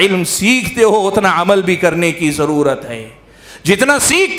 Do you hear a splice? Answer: no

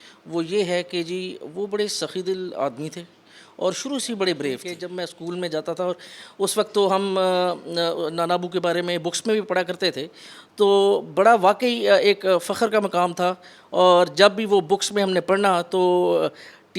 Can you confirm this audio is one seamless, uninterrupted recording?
no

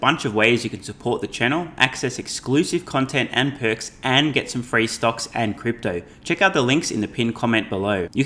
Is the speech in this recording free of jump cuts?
yes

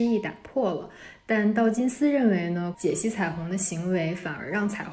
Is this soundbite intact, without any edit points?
no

